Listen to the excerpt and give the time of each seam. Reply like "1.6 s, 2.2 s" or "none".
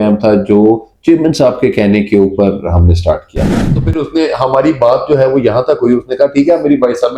3.6 s